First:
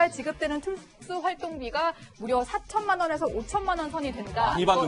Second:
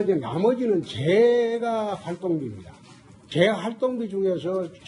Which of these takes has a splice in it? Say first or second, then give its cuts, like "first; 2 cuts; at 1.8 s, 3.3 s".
first; 1 cut; at 3.9 s